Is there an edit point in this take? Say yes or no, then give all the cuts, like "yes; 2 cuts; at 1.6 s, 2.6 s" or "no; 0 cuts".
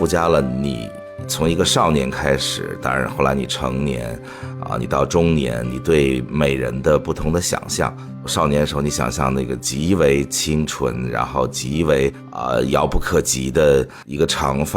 no; 0 cuts